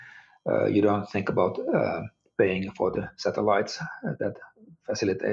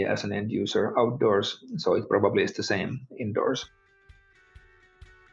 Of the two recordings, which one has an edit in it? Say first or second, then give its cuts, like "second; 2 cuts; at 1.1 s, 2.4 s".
second; 1 cut; at 3.8 s